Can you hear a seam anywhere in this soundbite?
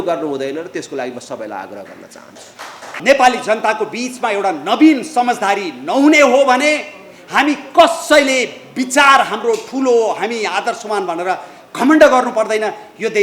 yes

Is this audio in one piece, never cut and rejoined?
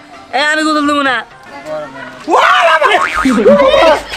no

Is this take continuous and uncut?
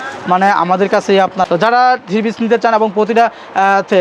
no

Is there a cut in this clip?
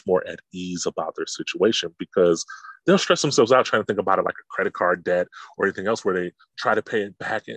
no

